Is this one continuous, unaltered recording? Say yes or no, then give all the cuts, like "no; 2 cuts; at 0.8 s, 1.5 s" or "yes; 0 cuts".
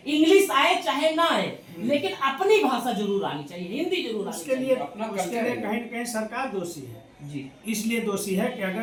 yes; 0 cuts